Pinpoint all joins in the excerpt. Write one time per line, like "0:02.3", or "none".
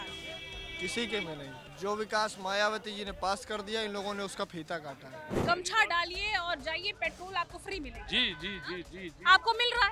0:01.6
0:05.3